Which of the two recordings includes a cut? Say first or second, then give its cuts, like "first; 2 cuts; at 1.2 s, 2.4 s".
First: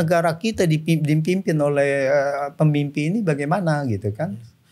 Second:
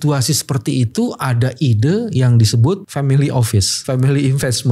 second; 2 cuts; at 2.9 s, 3.7 s